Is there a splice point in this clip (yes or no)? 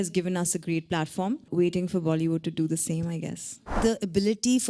yes